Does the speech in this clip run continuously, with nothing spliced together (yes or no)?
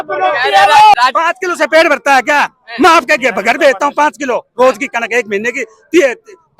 no